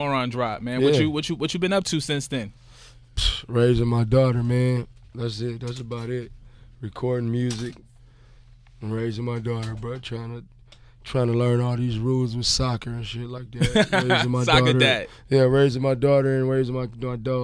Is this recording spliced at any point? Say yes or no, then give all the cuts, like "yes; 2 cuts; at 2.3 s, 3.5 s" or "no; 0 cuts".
yes; 1 cut; at 12.4 s